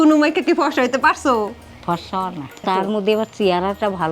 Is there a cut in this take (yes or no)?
no